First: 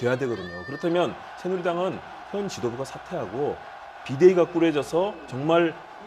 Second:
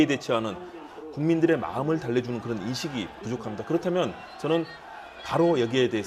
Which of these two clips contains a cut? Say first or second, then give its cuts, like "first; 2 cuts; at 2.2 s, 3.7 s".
first; 1 cut; at 4.5 s